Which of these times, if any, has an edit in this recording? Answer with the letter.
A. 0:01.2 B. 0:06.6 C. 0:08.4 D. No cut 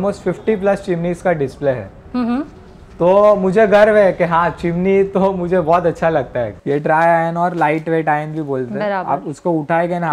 B